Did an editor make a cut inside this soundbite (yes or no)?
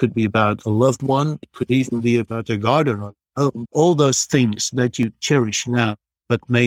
yes